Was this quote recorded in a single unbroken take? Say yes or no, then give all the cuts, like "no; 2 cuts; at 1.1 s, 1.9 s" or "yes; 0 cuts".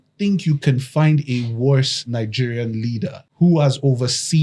no; 1 cut; at 3.2 s